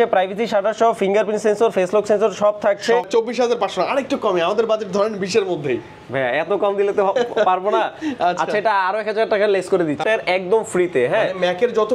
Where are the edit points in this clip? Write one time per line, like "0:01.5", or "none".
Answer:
0:03.0
0:10.0